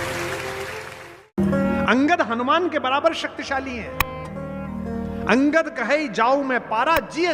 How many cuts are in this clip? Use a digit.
1